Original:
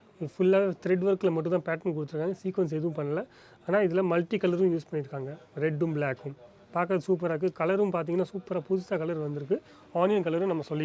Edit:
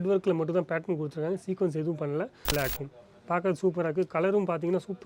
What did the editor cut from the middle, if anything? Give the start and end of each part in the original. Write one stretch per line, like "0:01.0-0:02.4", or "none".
0:03.5-0:06.0